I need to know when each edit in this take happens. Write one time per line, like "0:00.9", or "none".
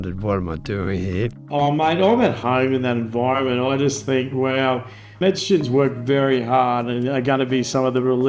0:01.4
0:02.4
0:05.2